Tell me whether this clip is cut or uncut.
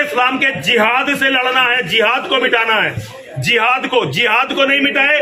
uncut